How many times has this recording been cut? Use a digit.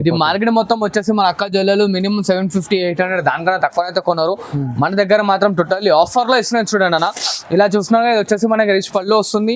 0